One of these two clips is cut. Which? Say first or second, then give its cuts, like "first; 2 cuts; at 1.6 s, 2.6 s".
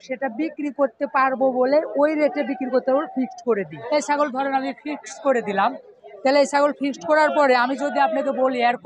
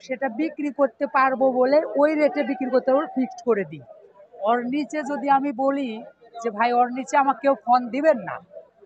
first; 1 cut; at 3.8 s